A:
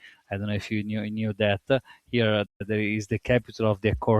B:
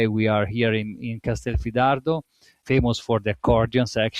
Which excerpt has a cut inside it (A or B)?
A